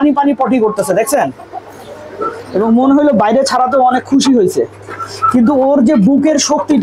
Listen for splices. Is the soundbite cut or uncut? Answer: cut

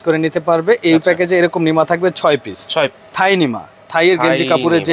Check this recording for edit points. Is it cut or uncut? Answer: cut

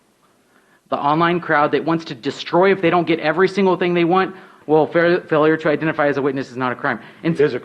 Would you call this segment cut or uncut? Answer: cut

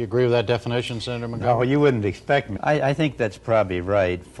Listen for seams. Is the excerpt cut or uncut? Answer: uncut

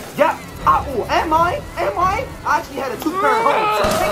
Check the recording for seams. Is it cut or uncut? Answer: uncut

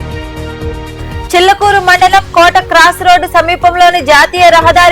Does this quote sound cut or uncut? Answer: cut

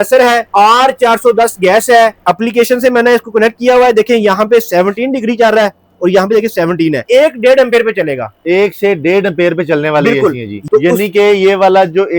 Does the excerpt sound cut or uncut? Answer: cut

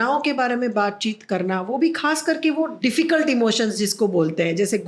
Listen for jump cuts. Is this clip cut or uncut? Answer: cut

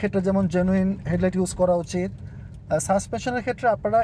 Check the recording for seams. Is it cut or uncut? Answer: uncut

